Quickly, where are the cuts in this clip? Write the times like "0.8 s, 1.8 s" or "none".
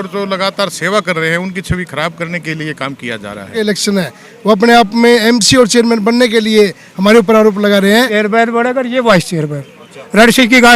3.6 s, 8.1 s